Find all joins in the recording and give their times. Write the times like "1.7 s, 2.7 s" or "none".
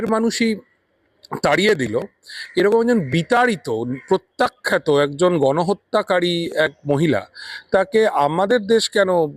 none